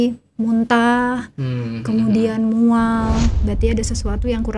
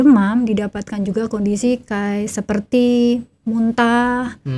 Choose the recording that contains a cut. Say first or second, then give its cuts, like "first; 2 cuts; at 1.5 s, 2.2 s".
first; 1 cut; at 3.4 s